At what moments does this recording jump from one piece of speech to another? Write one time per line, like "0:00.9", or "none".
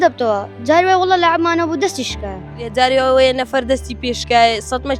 0:02.6